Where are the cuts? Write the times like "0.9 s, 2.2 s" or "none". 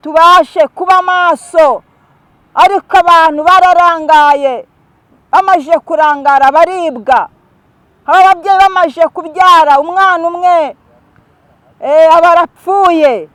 none